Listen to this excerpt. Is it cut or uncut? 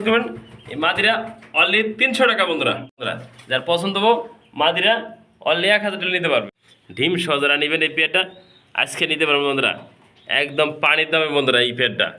cut